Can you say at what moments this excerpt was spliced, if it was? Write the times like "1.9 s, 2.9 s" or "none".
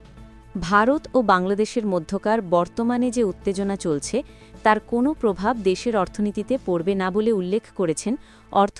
none